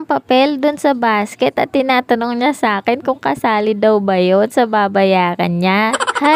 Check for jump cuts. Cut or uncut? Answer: uncut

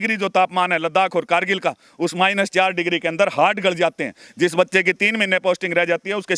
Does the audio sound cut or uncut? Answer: uncut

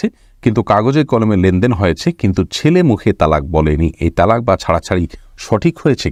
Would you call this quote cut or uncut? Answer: uncut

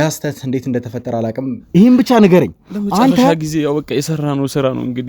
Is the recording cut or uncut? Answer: cut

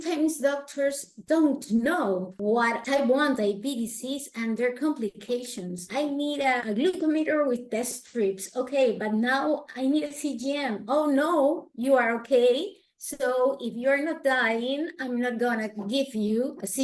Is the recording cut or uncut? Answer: uncut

